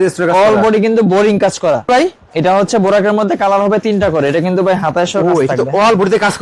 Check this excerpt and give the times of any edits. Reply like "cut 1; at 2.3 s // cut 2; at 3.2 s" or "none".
cut 1; at 1.9 s